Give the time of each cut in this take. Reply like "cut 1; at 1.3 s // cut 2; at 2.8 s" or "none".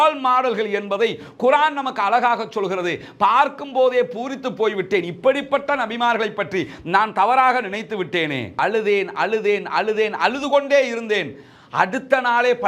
cut 1; at 8.5 s